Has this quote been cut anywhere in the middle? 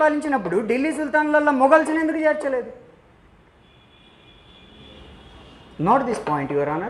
no; 0 cuts

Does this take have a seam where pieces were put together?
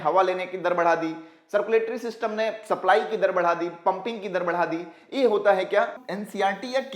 yes; 1 cut; at 6.0 s

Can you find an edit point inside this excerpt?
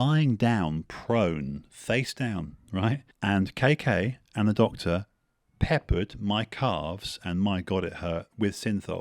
yes; 1 cut; at 3.1 s

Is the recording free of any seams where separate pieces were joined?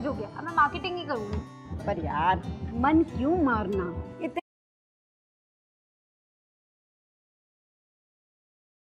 yes; 0 cuts

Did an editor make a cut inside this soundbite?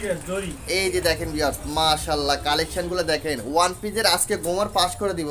no; 0 cuts

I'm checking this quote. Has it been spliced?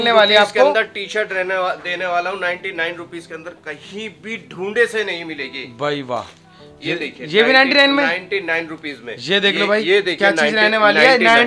no; 0 cuts

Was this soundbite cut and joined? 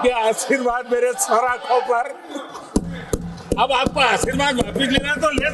no; 0 cuts

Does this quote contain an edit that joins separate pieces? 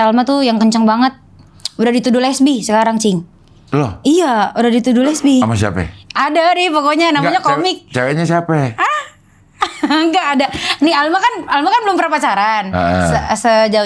no; 0 cuts

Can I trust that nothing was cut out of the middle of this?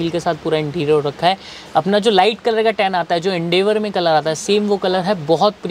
yes; 0 cuts

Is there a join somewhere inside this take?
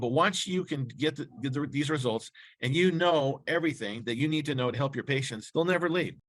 yes; 1 cut; at 5.4 s

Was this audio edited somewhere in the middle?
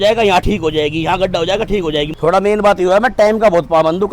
yes; 1 cut; at 2.1 s

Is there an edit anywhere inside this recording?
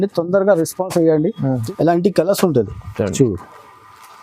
yes; 1 cut; at 1.6 s

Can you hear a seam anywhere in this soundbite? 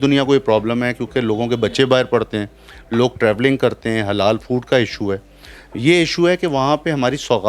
no; 0 cuts

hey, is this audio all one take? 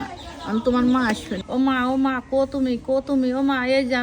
no; 1 cut; at 1.4 s

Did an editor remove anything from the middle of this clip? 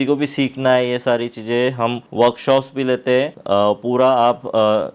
yes; 2 cuts; at 2.0 s, 3.4 s

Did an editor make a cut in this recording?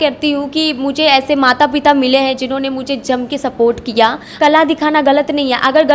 yes; 1 cut; at 4.2 s

